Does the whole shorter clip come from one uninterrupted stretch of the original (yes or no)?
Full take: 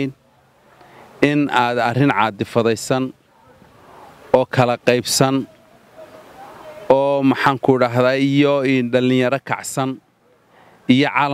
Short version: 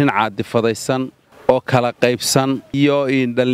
no